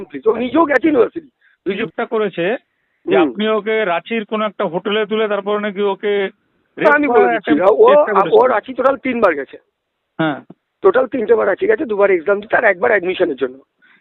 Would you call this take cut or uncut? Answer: cut